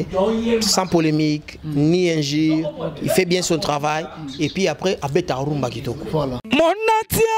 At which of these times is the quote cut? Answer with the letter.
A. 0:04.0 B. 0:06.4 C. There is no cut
B